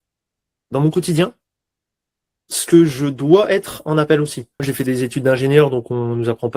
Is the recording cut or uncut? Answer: cut